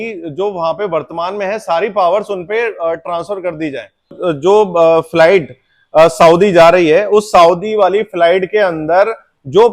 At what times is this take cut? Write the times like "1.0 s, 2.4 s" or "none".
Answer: 4.2 s